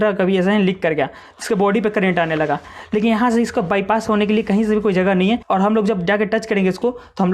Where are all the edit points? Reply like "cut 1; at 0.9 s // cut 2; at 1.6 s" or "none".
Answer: cut 1; at 5.4 s